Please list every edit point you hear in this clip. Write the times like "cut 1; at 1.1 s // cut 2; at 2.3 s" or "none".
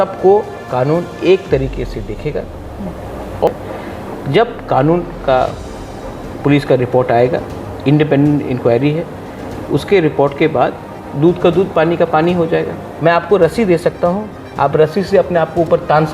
cut 1; at 3.5 s // cut 2; at 12.8 s

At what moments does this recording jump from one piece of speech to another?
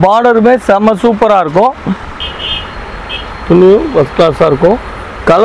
cut 1; at 2.2 s

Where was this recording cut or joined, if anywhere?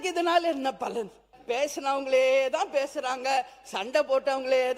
cut 1; at 1.3 s

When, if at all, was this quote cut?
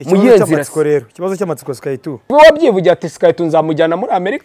cut 1; at 2.1 s

